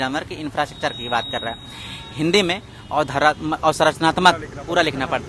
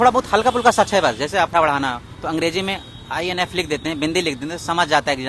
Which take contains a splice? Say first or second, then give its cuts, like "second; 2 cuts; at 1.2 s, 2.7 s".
second; 1 cut; at 1.5 s